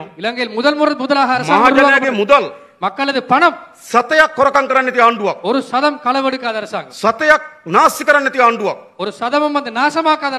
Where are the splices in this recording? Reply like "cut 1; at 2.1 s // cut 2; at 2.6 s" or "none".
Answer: none